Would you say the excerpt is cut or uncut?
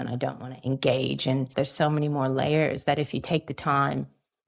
cut